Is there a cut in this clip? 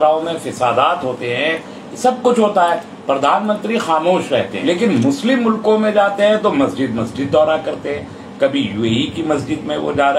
yes; 1 cut; at 4.5 s

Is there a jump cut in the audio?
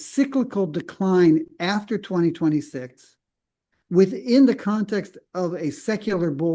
no; 0 cuts

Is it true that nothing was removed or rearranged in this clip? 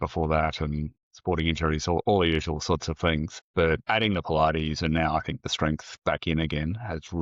no; 1 cut; at 3.7 s

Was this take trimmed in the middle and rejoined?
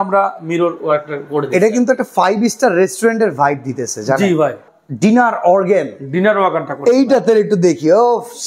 yes; 1 cut; at 4.7 s

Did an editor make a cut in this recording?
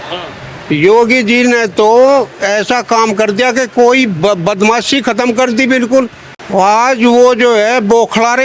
yes; 1 cut; at 6.2 s

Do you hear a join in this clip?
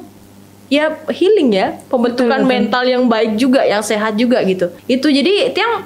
yes; 1 cut; at 4.8 s

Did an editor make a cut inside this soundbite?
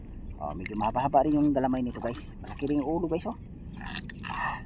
no; 0 cuts

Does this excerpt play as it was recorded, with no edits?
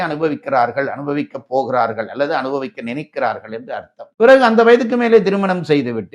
no; 1 cut; at 4.0 s

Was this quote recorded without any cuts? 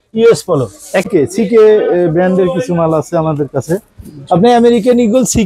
no; 1 cut; at 1.1 s

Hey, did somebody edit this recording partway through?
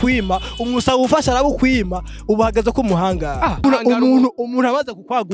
yes; 1 cut; at 3.6 s

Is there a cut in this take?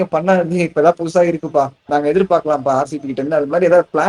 no; 0 cuts

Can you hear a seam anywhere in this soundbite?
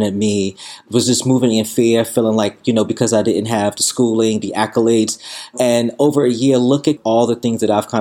yes; 3 cuts; at 0.8 s, 5.5 s, 7.0 s

